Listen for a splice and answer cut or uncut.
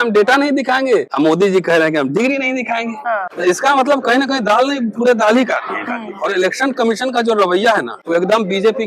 cut